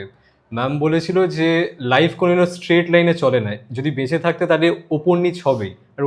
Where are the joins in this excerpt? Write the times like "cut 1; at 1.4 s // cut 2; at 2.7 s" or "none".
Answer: none